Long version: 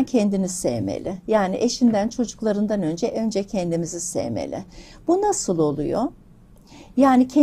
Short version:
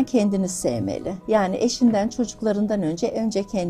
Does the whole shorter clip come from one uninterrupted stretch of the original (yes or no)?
yes